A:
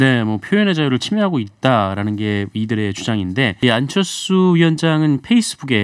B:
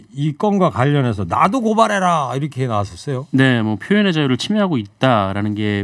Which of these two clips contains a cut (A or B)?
A